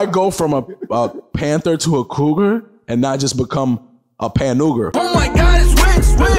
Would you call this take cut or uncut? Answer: cut